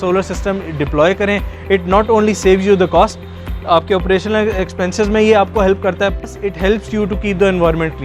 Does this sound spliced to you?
no; 0 cuts

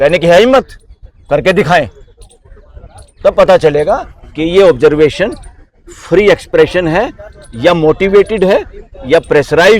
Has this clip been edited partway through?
no; 0 cuts

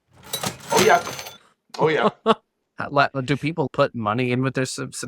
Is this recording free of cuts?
no; 1 cut; at 3.7 s

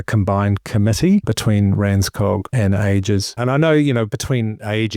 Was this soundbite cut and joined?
yes; 3 cuts; at 1.3 s, 2.5 s, 3.3 s

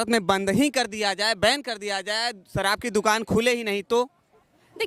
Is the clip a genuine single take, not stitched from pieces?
yes; 0 cuts

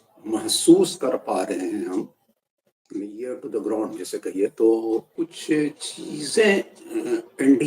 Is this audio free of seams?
no; 1 cut; at 5.1 s

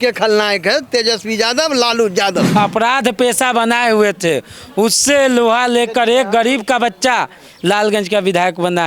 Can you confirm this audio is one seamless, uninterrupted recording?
no; 1 cut; at 2.5 s

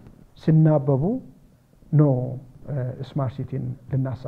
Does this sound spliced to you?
no; 0 cuts

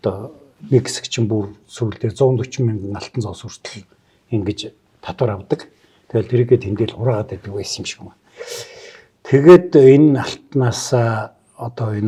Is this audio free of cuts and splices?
yes; 0 cuts

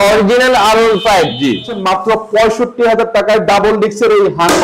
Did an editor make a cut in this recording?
yes; 1 cut; at 1.7 s

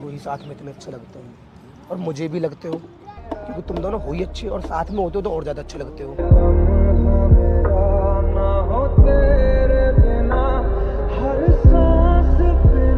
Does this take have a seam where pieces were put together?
no; 0 cuts

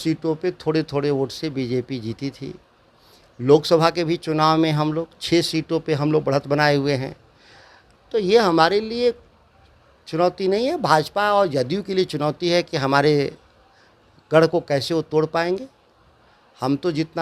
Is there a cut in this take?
no; 0 cuts

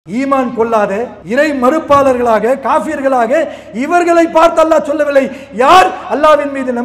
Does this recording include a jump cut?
yes; 1 cut; at 1.2 s

